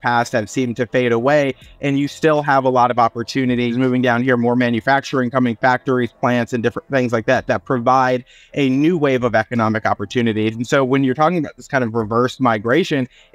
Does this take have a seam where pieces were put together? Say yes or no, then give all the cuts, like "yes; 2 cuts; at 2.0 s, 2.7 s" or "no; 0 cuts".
yes; 1 cut; at 3.7 s